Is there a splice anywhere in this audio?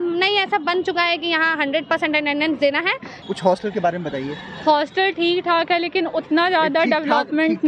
yes; 1 cut; at 3.2 s

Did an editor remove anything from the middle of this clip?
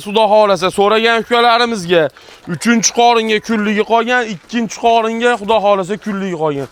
no; 0 cuts

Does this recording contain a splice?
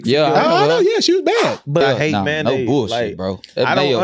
yes; 1 cut; at 1.8 s

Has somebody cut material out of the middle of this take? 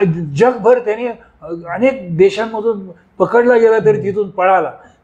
no; 0 cuts

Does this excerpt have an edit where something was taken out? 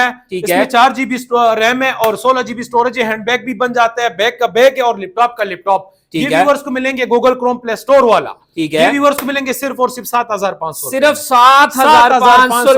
no; 0 cuts

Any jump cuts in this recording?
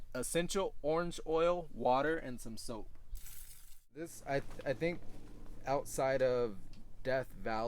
yes; 1 cut; at 3.8 s

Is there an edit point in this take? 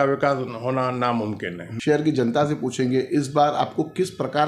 yes; 1 cut; at 1.7 s

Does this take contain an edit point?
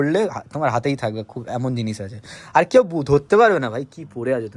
no; 0 cuts

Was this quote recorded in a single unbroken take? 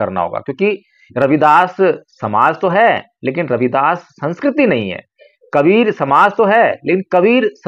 yes; 0 cuts

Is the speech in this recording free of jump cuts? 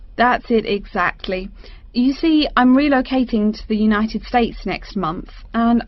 yes; 0 cuts

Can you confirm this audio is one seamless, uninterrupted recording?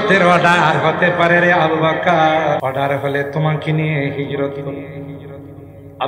no; 1 cut; at 2.6 s

